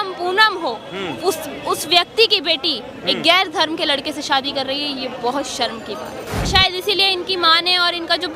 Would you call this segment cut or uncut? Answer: cut